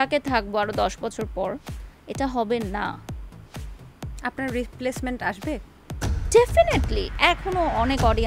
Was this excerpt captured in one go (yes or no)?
no